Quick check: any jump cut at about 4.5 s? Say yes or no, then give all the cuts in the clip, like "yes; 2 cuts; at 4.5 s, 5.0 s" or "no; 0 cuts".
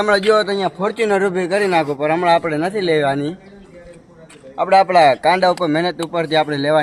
no; 0 cuts